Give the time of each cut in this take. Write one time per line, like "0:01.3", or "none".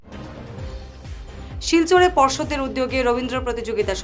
none